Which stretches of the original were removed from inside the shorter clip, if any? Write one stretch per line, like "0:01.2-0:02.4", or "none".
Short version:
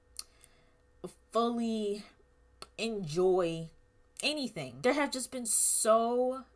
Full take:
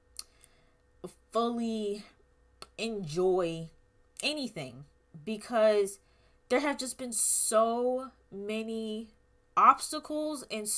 0:04.6-0:06.3